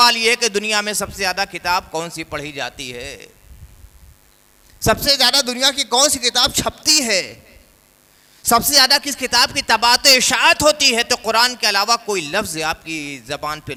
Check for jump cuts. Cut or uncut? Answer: uncut